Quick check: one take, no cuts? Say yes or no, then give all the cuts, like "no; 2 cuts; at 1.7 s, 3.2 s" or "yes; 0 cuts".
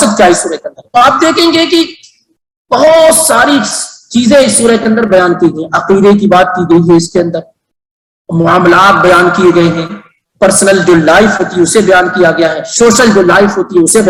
yes; 0 cuts